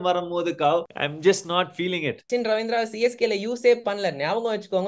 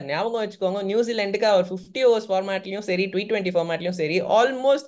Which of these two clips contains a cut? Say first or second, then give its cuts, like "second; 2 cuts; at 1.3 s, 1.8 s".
first; 2 cuts; at 1.0 s, 2.3 s